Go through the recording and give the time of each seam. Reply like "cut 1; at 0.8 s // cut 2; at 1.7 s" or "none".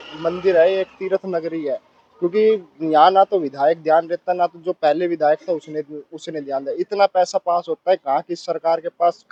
none